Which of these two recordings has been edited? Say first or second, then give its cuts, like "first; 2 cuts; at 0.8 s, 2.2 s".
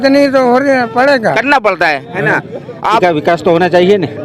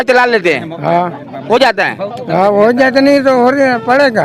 first; 1 cut; at 3.0 s